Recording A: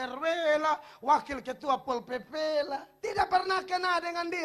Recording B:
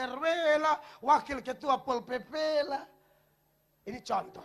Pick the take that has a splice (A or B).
A